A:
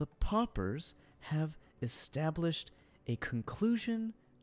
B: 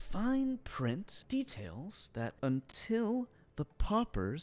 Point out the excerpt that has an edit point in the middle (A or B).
B